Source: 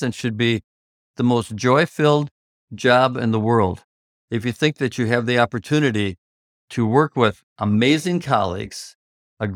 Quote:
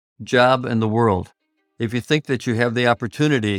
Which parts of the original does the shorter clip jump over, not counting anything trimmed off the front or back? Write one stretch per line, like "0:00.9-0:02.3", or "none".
none